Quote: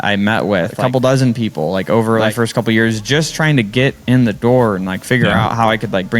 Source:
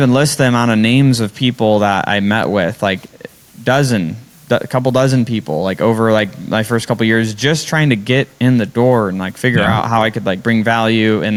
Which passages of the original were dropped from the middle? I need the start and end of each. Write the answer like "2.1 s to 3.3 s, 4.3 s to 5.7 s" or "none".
2.8 s to 4.7 s, 6.2 s to 6.6 s